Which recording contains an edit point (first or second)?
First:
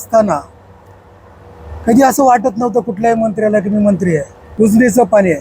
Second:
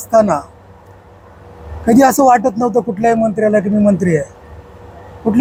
first